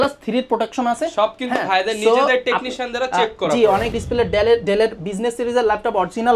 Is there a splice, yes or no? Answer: yes